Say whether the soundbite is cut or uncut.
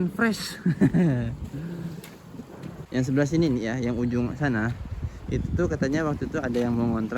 cut